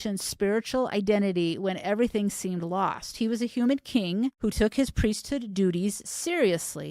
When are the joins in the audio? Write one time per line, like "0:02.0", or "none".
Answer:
0:04.4